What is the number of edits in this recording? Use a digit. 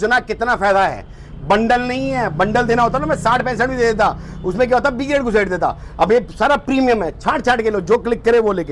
0